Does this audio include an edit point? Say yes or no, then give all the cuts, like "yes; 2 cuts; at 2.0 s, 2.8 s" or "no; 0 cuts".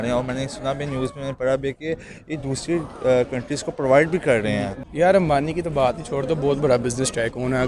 yes; 1 cut; at 4.8 s